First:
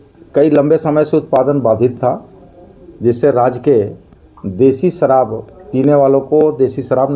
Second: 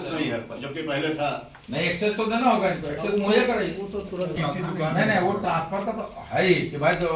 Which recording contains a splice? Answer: second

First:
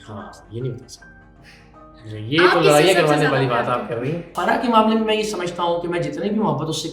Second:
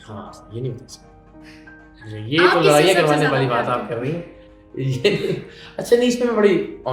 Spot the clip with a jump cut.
first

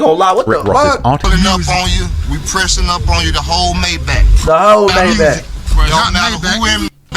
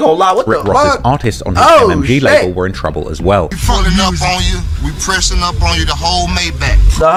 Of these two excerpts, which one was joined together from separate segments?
first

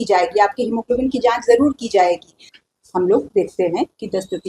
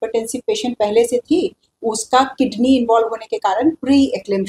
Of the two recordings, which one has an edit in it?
first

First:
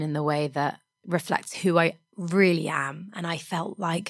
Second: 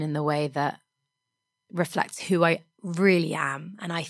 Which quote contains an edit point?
first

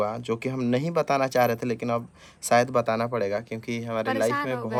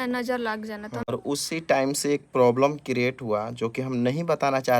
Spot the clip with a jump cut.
second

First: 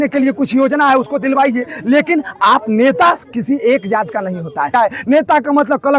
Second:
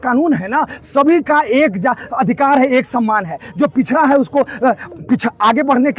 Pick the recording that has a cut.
first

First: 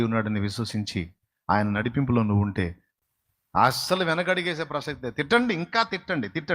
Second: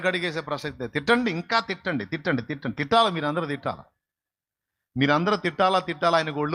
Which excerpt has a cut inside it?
first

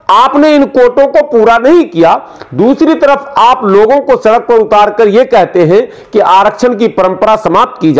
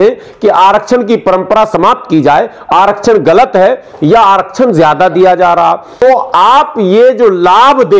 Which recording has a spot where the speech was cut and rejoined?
second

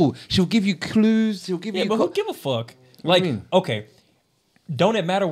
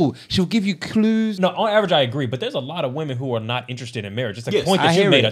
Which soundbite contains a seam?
second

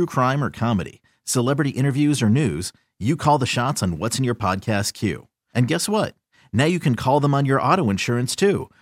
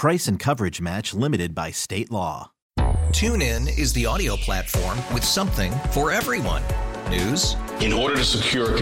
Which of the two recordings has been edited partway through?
second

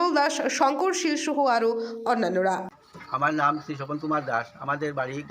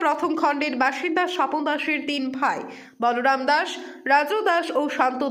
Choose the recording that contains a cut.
first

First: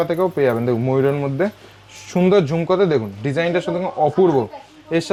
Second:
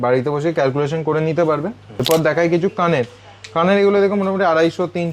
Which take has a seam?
second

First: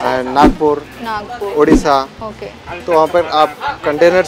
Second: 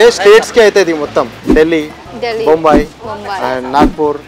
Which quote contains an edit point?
second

